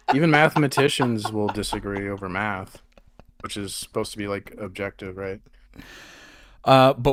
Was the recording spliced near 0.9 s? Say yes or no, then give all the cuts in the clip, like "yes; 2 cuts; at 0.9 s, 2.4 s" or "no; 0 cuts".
no; 0 cuts